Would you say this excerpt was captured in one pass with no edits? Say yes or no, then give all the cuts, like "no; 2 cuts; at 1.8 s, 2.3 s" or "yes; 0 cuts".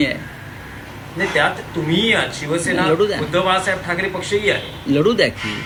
yes; 0 cuts